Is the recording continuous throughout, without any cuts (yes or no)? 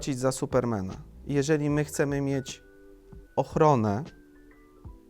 yes